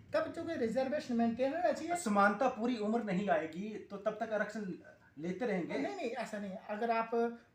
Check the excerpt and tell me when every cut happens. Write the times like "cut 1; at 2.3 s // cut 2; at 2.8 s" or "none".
none